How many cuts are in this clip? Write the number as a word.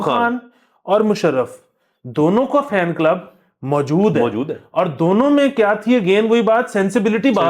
zero